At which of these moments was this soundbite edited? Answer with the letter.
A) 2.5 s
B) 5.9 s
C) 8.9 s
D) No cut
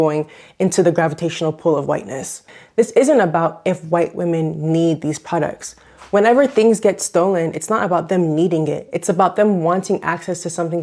A